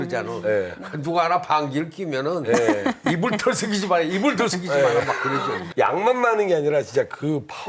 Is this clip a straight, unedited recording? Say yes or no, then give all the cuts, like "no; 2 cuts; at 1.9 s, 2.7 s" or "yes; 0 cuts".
no; 1 cut; at 5.6 s